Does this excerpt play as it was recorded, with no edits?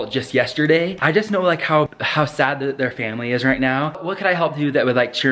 no; 2 cuts; at 0.9 s, 4.0 s

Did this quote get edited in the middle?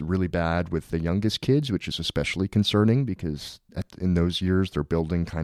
no; 0 cuts

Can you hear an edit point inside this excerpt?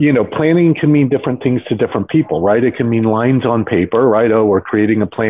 no; 0 cuts

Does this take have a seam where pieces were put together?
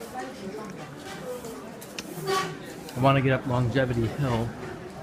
yes; 1 cut; at 1.3 s

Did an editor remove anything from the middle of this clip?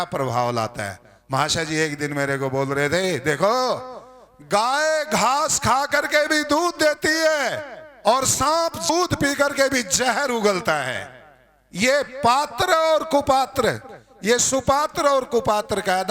yes; 1 cut; at 8.9 s

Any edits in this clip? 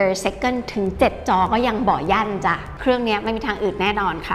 yes; 1 cut; at 2.7 s

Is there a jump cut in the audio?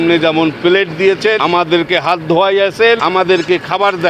yes; 2 cuts; at 1.4 s, 3.0 s

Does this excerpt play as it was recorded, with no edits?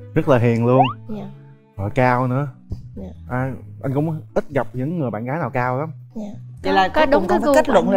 yes; 0 cuts

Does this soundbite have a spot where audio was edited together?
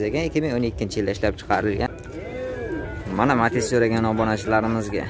yes; 1 cut; at 1.9 s

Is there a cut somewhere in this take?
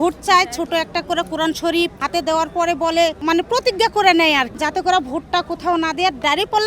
yes; 3 cuts; at 2.0 s, 3.2 s, 4.5 s

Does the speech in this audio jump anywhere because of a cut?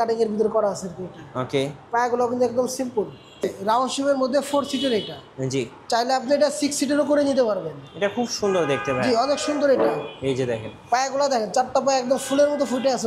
yes; 1 cut; at 3.4 s

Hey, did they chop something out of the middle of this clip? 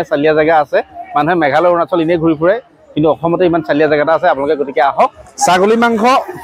yes; 1 cut; at 5.2 s

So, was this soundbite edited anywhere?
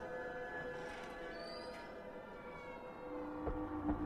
yes; 1 cut; at 3.1 s

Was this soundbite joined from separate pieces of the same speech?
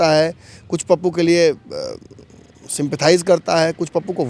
no; 0 cuts

